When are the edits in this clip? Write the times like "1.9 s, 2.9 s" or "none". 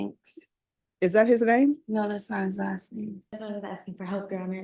3.4 s